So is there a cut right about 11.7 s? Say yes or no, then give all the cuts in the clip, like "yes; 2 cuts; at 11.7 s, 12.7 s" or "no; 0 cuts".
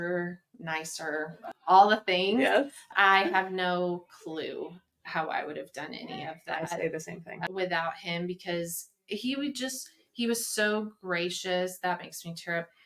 no; 3 cuts; at 1.5 s, 2.9 s, 7.5 s